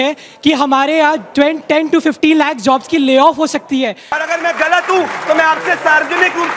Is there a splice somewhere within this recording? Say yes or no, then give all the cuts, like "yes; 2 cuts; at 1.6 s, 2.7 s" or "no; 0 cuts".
yes; 1 cut; at 4.2 s